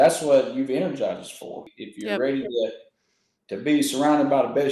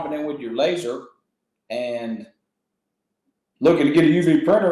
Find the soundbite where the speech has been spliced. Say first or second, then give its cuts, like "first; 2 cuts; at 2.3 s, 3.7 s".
first; 1 cut; at 1.7 s